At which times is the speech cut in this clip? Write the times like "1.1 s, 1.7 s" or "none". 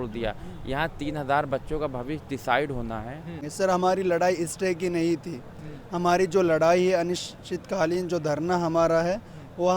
3.4 s